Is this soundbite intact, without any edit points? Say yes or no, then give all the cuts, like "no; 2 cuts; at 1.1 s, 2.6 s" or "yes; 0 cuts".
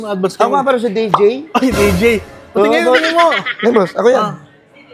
yes; 0 cuts